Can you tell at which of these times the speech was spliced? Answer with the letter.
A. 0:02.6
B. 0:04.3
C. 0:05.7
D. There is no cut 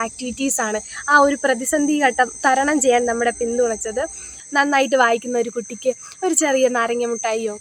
B